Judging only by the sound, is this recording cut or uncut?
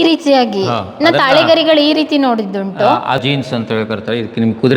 cut